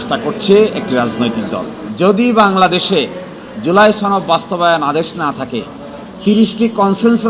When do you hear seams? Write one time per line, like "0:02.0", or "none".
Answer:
0:01.8